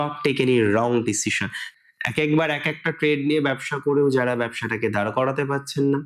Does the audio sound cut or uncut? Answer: cut